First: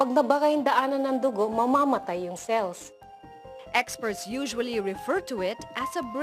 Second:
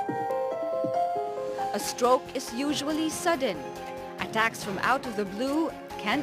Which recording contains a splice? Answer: second; 1 cut; at 1.3 s

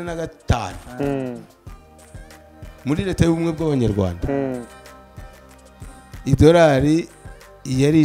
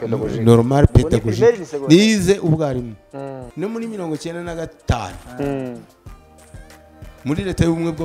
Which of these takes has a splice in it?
second; 1 cut; at 3.4 s

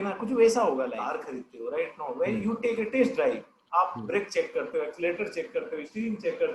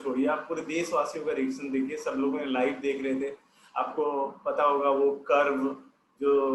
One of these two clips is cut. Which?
first; 1 cut; at 1.2 s

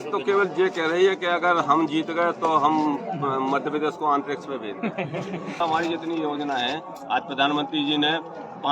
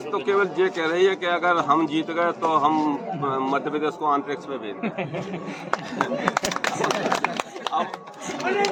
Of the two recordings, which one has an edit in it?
first; 1 cut; at 5.6 s

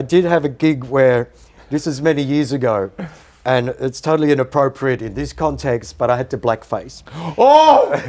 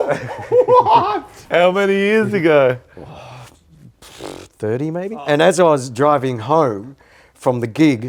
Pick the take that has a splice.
second; 2 cuts; at 1.4 s, 5.1 s

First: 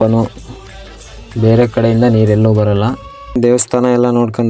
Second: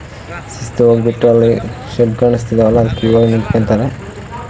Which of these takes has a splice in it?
first; 1 cut; at 3.4 s

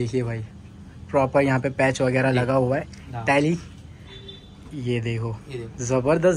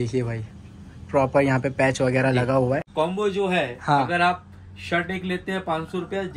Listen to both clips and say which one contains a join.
second; 1 cut; at 2.9 s

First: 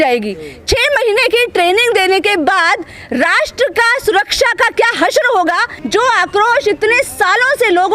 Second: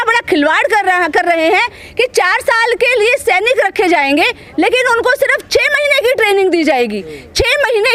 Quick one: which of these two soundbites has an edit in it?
first; 1 cut; at 5.7 s

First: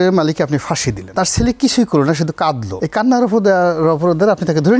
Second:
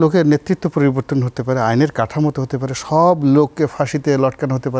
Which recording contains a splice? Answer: first; 2 cuts; at 1.0 s, 2.7 s

